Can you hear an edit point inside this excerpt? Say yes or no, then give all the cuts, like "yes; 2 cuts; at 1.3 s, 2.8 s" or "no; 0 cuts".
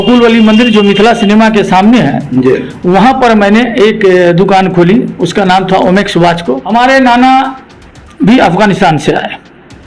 yes; 1 cut; at 6.6 s